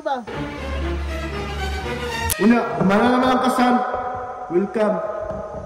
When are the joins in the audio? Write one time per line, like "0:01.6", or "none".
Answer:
0:02.2